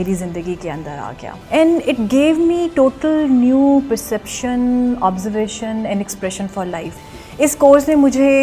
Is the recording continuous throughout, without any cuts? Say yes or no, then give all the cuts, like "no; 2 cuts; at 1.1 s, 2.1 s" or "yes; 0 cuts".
no; 2 cuts; at 1.3 s, 6.9 s